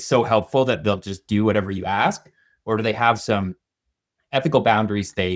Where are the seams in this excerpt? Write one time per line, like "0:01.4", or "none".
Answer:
none